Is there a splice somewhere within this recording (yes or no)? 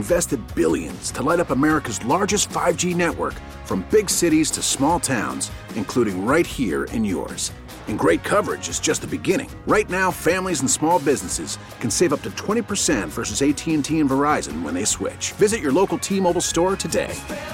no